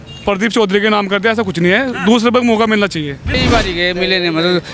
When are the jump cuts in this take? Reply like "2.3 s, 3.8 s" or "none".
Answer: 3.4 s